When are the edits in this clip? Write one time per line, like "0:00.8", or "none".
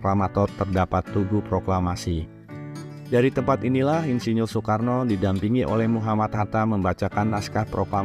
none